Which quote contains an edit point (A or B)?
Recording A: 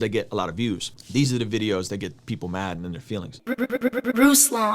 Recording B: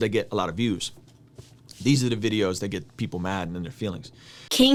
A